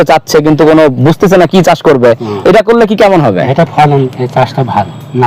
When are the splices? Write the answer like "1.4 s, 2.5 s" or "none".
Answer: none